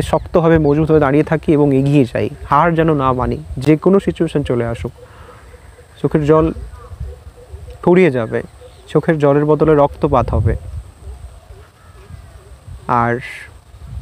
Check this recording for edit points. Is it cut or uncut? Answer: uncut